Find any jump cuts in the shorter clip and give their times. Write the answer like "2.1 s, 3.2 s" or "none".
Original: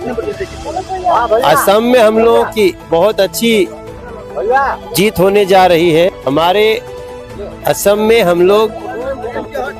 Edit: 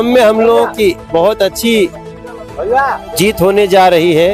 none